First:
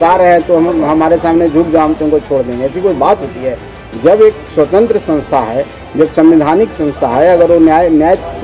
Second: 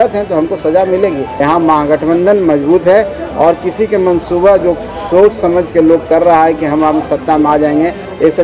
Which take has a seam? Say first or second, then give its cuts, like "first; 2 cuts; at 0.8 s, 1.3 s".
second; 1 cut; at 1.3 s